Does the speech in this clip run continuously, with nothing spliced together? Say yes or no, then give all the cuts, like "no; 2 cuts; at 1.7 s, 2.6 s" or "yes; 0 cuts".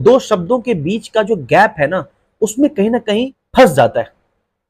no; 1 cut; at 3.4 s